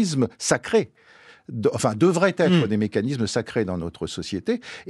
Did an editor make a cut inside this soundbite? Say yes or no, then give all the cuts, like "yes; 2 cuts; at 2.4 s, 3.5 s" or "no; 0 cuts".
no; 0 cuts